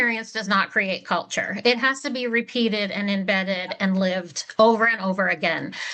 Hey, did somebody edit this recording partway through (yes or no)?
no